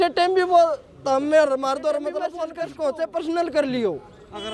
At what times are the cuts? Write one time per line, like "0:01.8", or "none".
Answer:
0:02.4

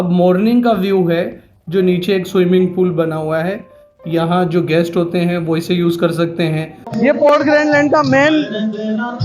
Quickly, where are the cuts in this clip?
0:06.8

